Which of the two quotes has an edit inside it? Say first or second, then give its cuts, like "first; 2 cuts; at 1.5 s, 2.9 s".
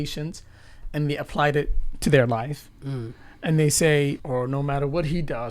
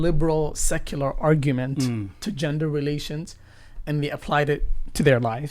first; 1 cut; at 4.2 s